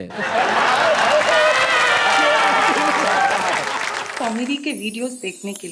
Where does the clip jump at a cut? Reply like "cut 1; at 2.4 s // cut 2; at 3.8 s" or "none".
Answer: cut 1; at 4.0 s